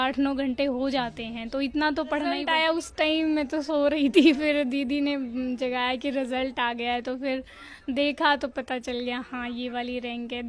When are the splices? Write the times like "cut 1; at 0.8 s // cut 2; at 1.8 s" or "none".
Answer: cut 1; at 2.5 s